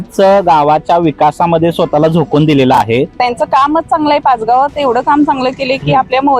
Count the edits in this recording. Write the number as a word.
one